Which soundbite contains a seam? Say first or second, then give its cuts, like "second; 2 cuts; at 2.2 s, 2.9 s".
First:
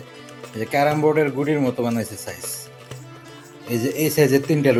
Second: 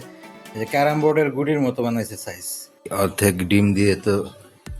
second; 1 cut; at 2.8 s